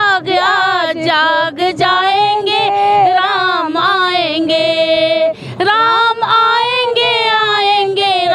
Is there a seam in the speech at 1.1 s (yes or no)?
no